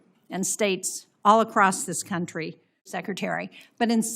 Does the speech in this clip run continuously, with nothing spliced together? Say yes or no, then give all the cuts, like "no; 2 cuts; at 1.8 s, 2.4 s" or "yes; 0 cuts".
no; 1 cut; at 2.9 s